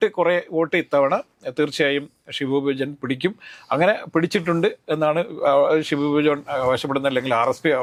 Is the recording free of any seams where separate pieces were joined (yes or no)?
yes